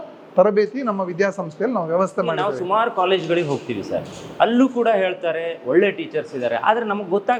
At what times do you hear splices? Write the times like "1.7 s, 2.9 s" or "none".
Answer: none